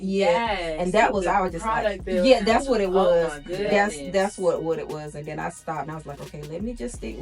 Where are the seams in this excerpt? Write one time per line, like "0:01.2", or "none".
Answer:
none